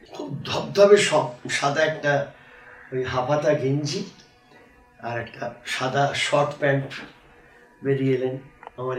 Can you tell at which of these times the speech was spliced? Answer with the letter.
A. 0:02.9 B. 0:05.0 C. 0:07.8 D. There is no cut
D